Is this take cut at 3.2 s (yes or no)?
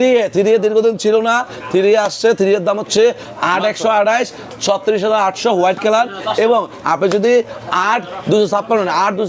no